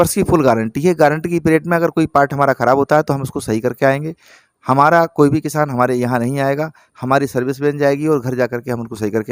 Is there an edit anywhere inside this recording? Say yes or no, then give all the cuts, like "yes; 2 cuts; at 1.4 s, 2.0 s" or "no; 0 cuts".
no; 0 cuts